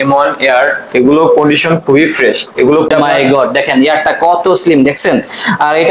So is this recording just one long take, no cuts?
no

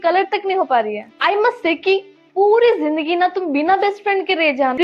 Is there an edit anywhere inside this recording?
no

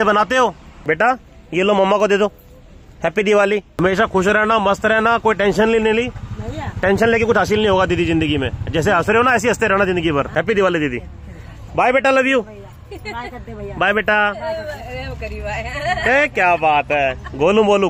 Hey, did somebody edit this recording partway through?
yes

